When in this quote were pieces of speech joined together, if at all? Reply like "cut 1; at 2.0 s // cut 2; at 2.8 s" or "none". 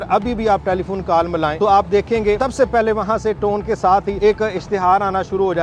cut 1; at 1.5 s // cut 2; at 2.4 s // cut 3; at 4.1 s